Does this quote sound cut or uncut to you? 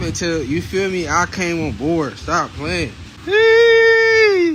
uncut